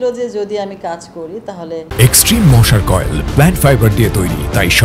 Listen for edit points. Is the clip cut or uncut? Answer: uncut